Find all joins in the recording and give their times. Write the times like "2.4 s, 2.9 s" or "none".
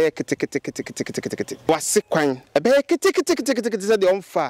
1.7 s